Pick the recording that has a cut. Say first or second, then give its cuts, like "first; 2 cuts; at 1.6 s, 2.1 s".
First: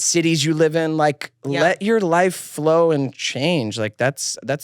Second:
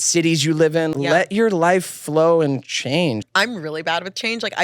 second; 2 cuts; at 0.9 s, 3.2 s